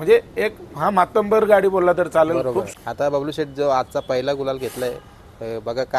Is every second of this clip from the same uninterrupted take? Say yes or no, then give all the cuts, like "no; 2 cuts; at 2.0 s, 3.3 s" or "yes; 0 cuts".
no; 1 cut; at 2.7 s